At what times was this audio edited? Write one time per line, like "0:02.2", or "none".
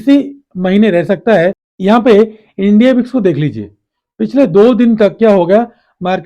0:01.7